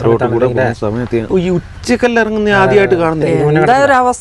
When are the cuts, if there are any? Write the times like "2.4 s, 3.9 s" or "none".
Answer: 1.3 s, 3.2 s